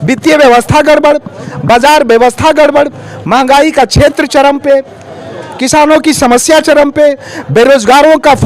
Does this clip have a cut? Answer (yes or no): no